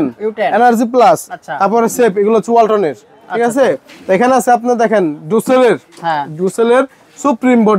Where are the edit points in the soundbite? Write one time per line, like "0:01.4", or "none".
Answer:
none